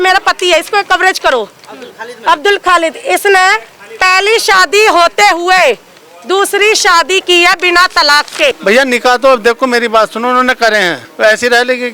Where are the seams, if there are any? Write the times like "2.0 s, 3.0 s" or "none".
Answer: 8.6 s, 11.0 s